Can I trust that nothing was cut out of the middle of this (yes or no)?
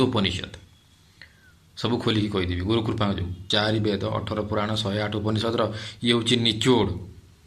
no